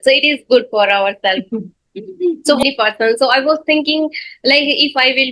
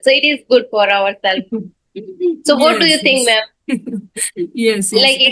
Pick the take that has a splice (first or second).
first